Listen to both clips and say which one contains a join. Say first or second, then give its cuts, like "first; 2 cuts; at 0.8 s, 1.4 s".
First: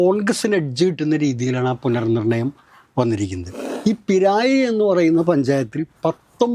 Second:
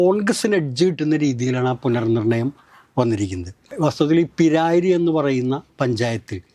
first; 1 cut; at 3.6 s